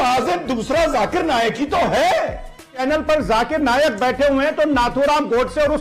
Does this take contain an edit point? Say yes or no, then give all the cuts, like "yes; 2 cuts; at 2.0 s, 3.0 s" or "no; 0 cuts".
yes; 1 cut; at 2.8 s